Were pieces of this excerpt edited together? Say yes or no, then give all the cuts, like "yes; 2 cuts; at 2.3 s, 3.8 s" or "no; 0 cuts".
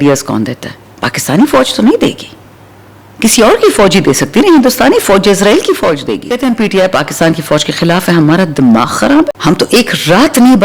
yes; 2 cuts; at 6.3 s, 9.4 s